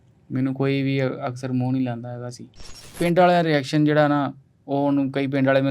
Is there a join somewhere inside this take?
yes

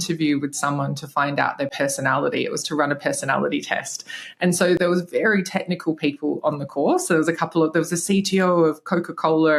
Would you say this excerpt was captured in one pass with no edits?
yes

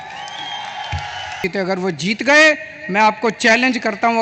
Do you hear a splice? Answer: yes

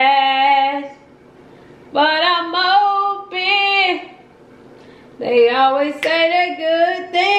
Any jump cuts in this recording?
no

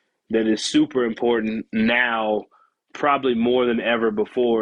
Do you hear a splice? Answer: no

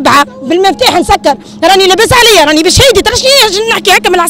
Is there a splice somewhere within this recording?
no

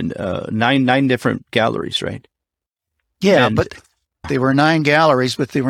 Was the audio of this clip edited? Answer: yes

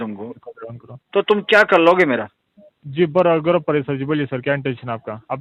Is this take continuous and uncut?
yes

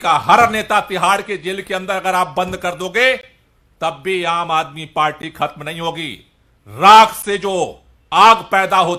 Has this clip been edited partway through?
no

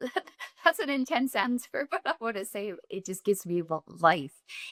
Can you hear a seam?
no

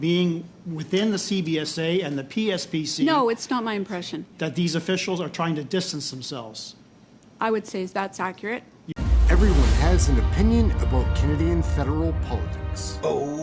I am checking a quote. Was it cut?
yes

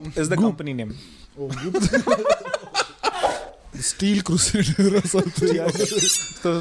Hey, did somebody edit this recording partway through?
yes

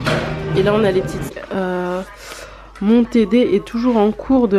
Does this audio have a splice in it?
yes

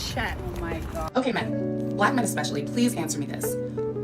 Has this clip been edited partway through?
yes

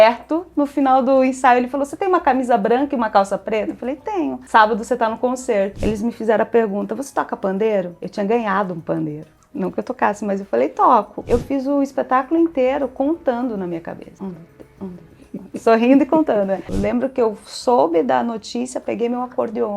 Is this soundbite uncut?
no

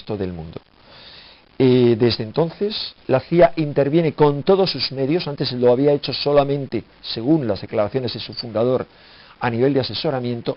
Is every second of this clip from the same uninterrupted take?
no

